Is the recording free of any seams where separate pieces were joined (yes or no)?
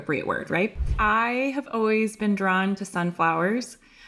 no